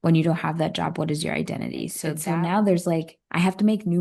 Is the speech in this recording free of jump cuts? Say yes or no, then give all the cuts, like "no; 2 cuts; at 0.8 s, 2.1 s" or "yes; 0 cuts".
no; 1 cut; at 2.1 s